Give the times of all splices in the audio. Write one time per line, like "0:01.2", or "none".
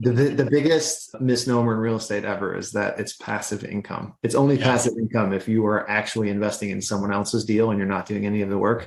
none